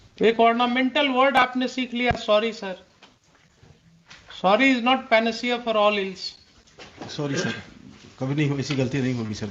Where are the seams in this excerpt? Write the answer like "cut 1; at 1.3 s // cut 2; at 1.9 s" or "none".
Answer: none